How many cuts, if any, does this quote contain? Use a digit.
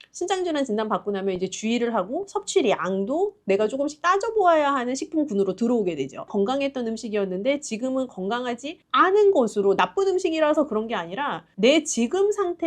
2